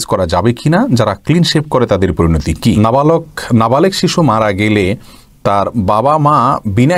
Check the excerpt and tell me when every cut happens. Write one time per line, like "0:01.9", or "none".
0:02.8